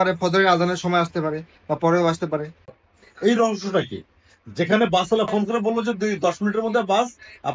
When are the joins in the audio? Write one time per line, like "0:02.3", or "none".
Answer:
0:02.6